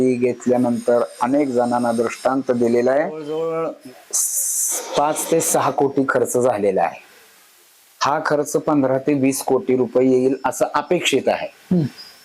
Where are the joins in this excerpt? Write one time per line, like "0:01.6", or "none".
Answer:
0:03.3